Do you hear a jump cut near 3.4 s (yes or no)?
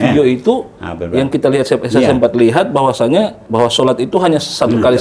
yes